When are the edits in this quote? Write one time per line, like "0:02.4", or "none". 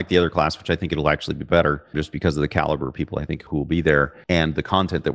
none